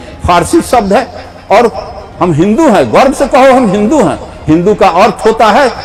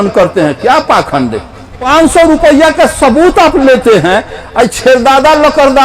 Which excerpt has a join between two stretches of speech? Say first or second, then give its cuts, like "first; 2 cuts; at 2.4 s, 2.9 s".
second; 1 cut; at 1.8 s